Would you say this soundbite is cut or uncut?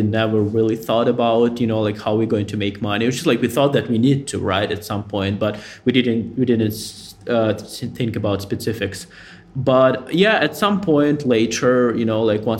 uncut